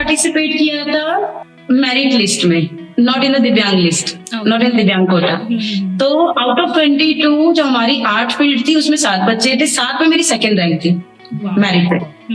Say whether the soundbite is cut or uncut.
cut